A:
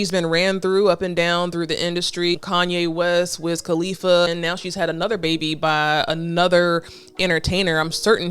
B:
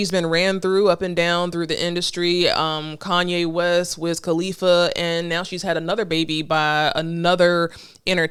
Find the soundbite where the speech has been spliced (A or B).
A